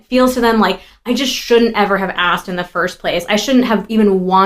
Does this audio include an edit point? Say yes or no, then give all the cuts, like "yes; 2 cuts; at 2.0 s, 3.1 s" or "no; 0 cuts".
no; 0 cuts